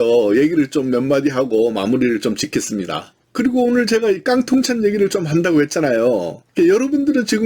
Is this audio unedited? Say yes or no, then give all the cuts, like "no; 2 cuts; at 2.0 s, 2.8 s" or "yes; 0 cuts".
no; 1 cut; at 3.1 s